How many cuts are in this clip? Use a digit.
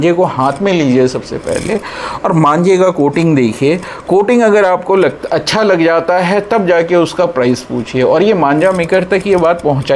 0